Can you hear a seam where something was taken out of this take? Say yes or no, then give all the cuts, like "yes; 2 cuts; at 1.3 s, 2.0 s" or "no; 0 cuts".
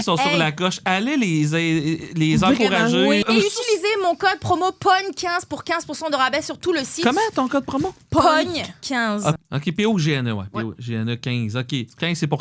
yes; 2 cuts; at 3.2 s, 9.4 s